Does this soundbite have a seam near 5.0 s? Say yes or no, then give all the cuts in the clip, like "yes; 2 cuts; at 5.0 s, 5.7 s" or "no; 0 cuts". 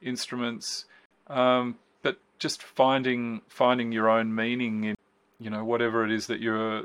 yes; 1 cut; at 5.0 s